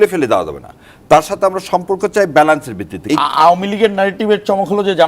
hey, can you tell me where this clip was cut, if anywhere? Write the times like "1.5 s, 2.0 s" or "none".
2.9 s